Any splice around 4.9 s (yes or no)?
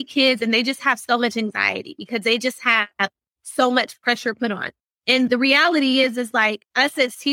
yes